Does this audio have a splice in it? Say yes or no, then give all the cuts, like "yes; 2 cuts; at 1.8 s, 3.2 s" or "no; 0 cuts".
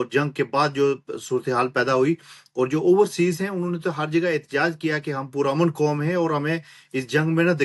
no; 0 cuts